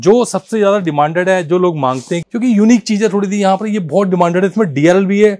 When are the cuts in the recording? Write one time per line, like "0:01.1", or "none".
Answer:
0:02.2